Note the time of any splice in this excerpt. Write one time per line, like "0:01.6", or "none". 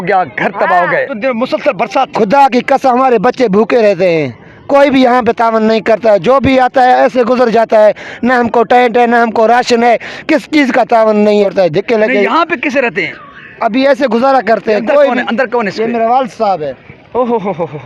0:01.1
0:11.4